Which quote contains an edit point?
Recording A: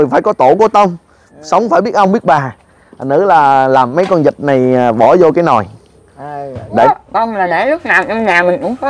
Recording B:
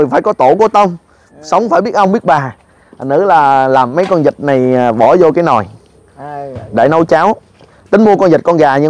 A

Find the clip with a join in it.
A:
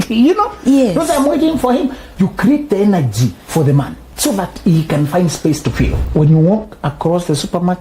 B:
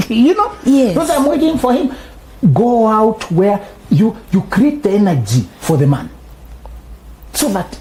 A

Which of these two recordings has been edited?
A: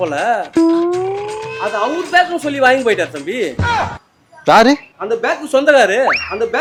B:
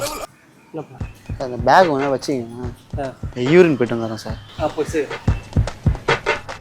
B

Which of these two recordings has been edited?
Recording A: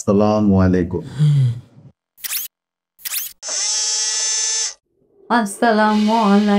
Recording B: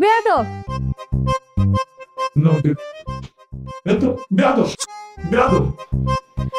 A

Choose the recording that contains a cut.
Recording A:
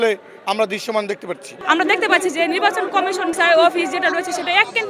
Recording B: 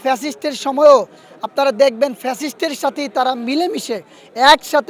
A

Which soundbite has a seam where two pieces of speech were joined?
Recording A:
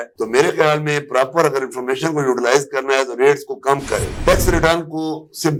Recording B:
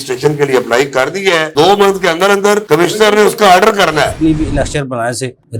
B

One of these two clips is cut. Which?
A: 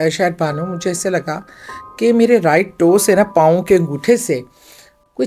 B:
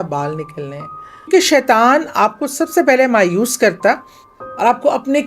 B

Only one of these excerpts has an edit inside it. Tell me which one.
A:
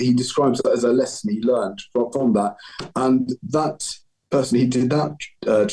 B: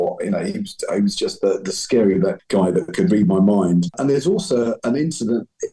B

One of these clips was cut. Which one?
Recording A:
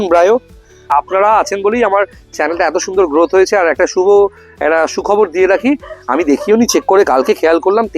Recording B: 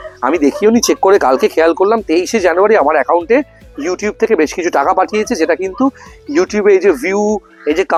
A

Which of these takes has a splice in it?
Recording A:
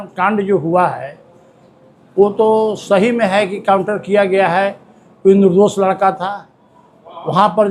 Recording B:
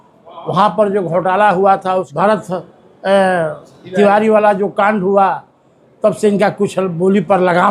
B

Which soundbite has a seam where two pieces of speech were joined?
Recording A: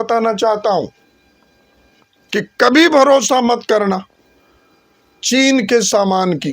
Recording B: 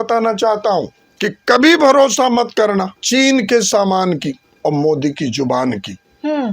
B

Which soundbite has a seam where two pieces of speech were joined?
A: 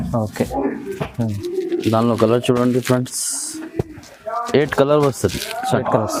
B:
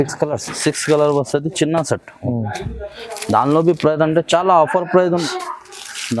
B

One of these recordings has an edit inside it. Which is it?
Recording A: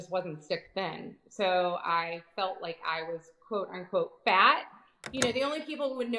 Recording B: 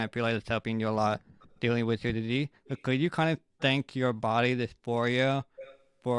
A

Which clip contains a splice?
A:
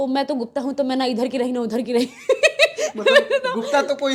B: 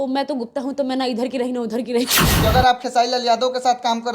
B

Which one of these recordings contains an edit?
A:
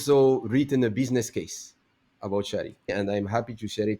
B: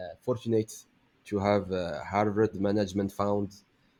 A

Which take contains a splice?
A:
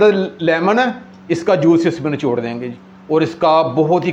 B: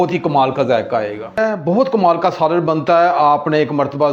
B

